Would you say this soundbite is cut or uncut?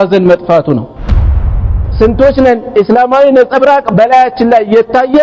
cut